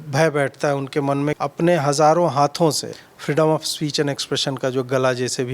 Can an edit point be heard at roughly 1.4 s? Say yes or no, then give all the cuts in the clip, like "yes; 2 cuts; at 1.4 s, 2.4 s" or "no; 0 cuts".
yes; 2 cuts; at 1.4 s, 2.9 s